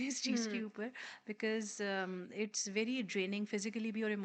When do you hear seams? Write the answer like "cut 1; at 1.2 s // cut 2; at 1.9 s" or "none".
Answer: none